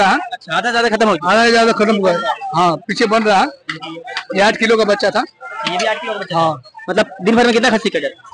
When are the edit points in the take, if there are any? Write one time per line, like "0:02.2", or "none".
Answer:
none